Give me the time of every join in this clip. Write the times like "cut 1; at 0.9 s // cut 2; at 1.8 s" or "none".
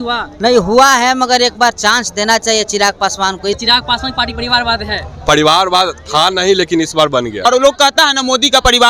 cut 1; at 3.6 s // cut 2; at 7.5 s